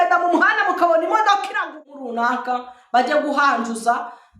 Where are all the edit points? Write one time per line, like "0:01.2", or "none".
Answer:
0:01.7